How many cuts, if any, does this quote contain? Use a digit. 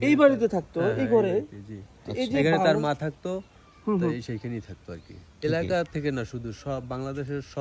1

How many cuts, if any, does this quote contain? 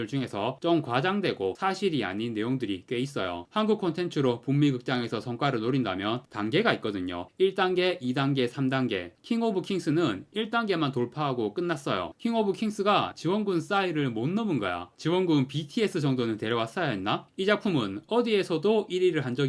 3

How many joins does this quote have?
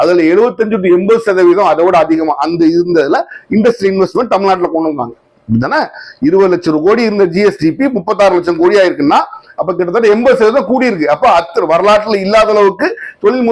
0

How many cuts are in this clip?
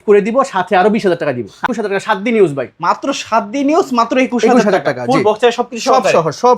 1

